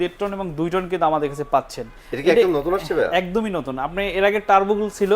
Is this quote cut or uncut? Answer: uncut